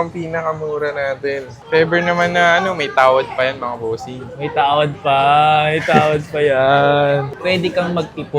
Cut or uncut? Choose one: cut